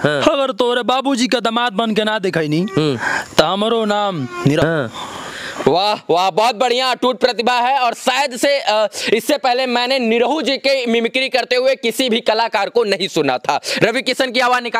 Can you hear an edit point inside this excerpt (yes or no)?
no